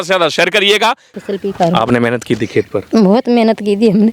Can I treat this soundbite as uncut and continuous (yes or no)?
no